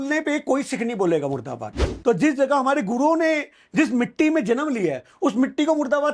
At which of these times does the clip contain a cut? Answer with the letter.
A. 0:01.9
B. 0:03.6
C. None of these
A